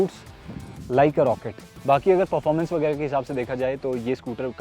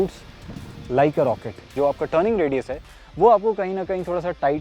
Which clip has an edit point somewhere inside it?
second; 1 cut; at 1.7 s

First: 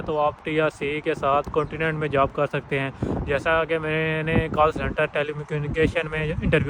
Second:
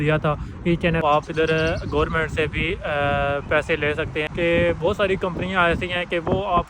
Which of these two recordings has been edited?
second; 2 cuts; at 1.0 s, 4.3 s

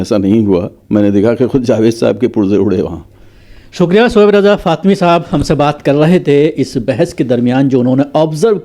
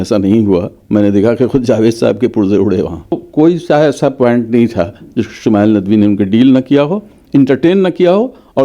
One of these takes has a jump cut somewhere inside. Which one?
second; 1 cut; at 3.2 s

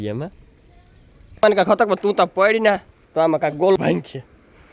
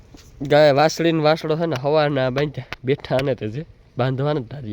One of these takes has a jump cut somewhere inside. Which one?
first; 2 cuts; at 1.4 s, 3.8 s

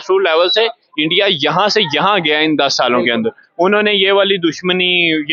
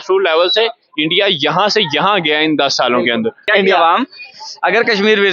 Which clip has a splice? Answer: second; 1 cut; at 3.5 s

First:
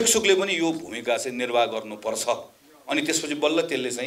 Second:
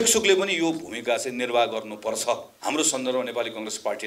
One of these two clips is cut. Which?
second; 1 cut; at 2.5 s

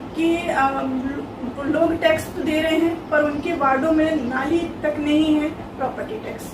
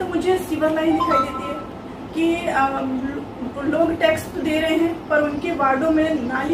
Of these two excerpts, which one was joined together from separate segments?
first; 1 cut; at 5.6 s

